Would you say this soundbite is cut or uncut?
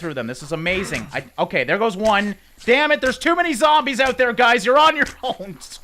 uncut